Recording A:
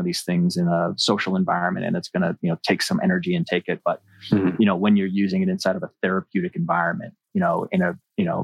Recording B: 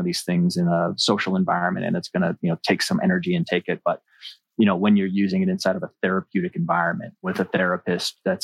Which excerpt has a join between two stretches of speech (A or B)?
B